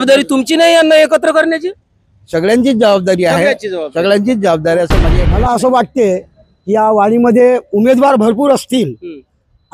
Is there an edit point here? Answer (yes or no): yes